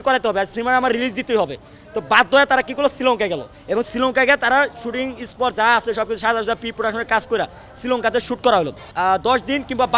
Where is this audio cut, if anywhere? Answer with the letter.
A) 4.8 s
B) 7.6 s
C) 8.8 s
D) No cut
C